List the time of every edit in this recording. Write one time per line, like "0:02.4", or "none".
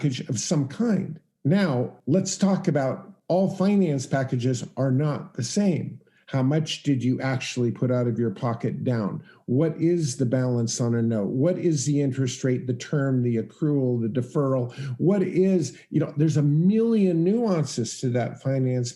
0:01.2
0:02.0
0:03.1